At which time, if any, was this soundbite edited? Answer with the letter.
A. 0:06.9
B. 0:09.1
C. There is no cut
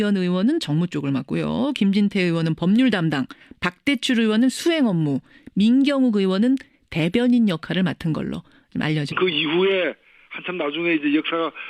C